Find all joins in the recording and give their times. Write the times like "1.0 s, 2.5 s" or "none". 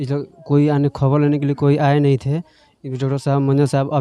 none